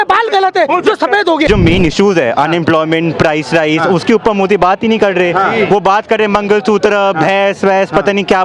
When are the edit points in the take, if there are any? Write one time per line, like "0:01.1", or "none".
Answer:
0:01.5